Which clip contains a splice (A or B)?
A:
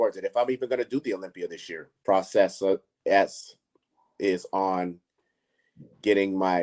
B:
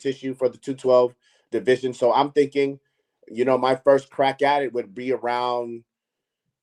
A